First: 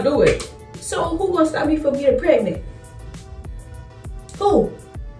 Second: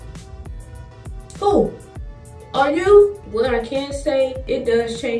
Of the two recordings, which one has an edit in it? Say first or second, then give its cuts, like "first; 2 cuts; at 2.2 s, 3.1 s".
second; 2 cuts; at 3.2 s, 4.4 s